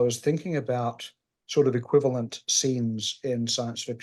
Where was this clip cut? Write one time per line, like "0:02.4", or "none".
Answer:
none

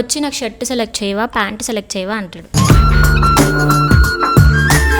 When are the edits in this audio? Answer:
none

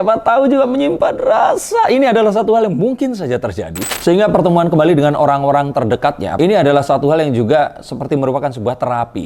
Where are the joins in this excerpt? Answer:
0:03.9
0:06.3

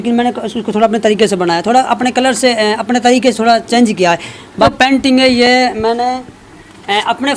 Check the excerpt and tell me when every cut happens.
0:04.6

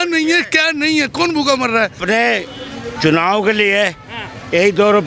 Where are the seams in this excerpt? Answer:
0:02.0

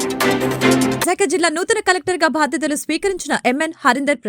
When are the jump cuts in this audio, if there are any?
0:01.0

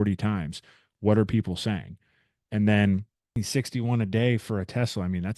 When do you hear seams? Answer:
0:03.4

